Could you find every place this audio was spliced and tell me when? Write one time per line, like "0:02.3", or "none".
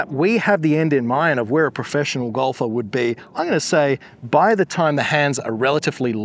none